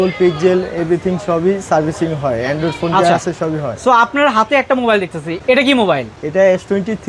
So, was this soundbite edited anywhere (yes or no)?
no